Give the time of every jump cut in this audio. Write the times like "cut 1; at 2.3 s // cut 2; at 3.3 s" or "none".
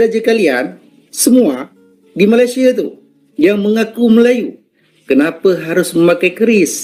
none